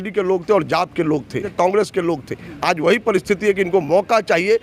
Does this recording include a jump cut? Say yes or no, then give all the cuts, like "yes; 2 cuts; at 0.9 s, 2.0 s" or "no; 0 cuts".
yes; 1 cut; at 1.5 s